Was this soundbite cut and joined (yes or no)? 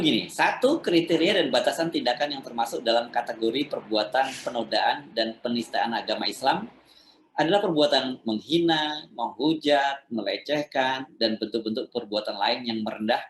no